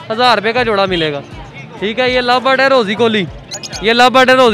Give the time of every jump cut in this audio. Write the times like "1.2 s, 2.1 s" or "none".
none